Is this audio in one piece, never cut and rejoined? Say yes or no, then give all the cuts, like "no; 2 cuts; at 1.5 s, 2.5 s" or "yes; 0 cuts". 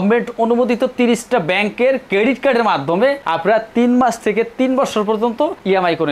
yes; 0 cuts